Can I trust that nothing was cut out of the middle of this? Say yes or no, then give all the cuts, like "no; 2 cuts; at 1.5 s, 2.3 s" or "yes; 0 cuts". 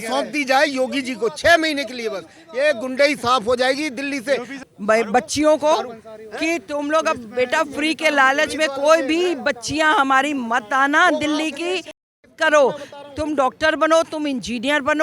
no; 1 cut; at 4.5 s